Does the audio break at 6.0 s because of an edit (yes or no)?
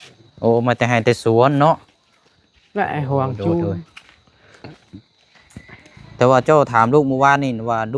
yes